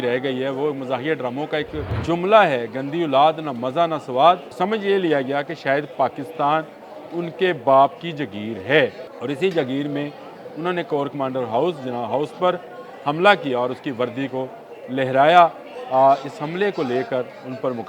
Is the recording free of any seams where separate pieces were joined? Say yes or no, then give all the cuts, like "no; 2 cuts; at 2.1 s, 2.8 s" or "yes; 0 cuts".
no; 3 cuts; at 1.9 s, 4.5 s, 9.1 s